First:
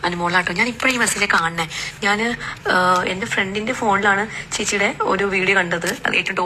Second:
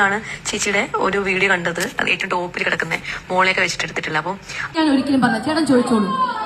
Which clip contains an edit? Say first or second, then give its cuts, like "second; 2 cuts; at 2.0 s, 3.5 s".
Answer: second; 1 cut; at 4.6 s